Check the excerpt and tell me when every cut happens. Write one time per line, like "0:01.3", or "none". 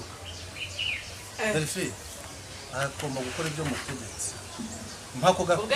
0:02.6

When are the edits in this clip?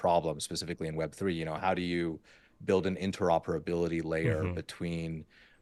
none

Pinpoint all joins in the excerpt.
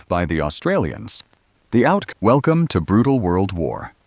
0:02.2

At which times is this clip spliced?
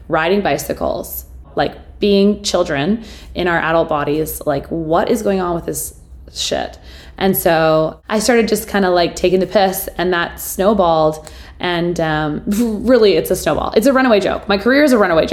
0:01.5
0:08.0

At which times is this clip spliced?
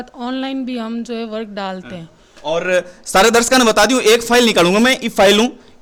none

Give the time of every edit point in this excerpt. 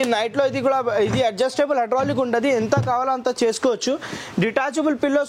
none

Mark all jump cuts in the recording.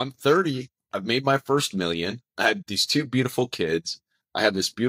none

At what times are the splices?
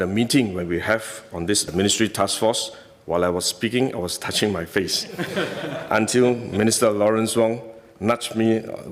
none

